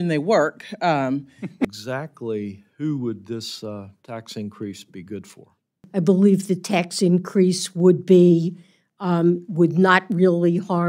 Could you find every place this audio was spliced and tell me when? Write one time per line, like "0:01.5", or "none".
0:01.7
0:05.8